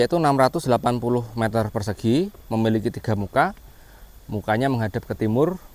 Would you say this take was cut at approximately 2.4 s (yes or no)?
no